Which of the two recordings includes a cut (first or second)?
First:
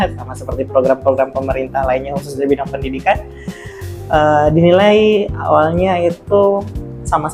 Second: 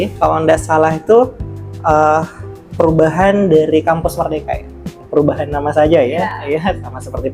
second